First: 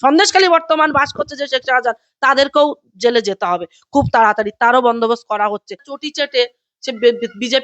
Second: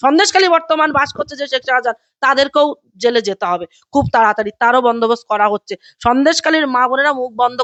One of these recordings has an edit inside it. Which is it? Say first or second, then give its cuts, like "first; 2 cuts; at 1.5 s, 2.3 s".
first; 1 cut; at 5.8 s